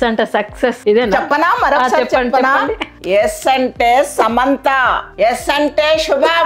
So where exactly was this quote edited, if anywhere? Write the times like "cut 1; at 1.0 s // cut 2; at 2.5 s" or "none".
none